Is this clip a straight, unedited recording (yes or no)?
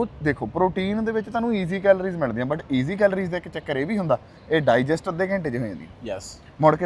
yes